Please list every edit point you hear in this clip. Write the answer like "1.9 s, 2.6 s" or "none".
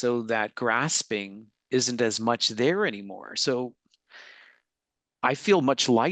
none

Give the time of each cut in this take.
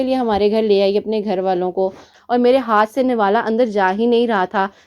2.1 s

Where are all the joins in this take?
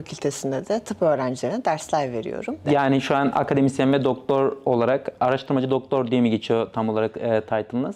none

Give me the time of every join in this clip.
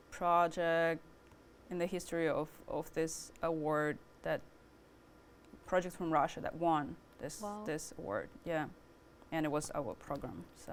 none

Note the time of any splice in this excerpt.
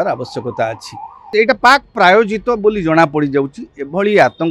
1.3 s

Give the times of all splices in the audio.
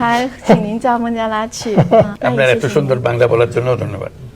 2.1 s

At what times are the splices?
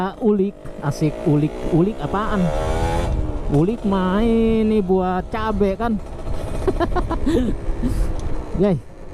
none

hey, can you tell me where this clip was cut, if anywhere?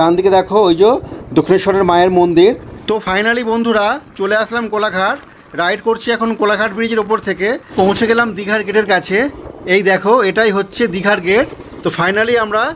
3.0 s, 7.7 s, 11.6 s

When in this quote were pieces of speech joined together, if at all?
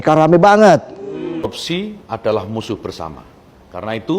1.5 s

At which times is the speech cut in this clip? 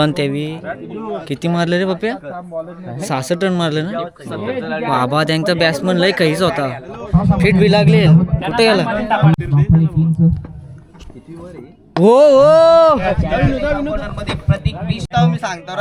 none

